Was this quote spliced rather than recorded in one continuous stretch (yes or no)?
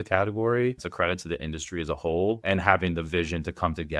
yes